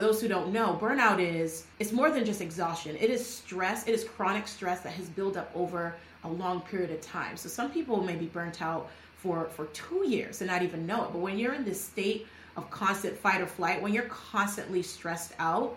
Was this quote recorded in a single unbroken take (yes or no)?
yes